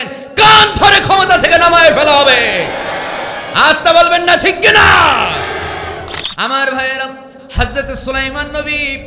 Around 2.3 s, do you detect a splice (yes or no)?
no